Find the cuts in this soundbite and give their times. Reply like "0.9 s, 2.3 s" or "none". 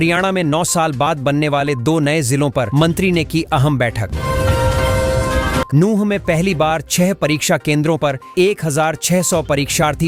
none